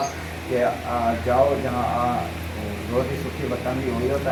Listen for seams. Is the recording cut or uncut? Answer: uncut